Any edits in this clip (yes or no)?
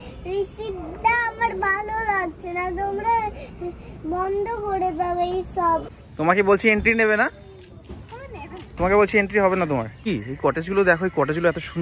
yes